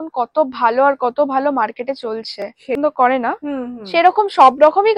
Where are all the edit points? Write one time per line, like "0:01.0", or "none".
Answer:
0:02.8